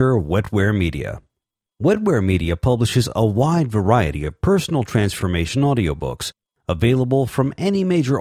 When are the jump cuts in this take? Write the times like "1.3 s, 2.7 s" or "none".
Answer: none